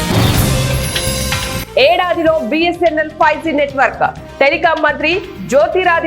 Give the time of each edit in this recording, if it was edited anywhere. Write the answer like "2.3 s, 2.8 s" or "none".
1.6 s